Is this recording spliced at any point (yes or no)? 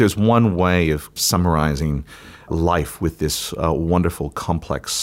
yes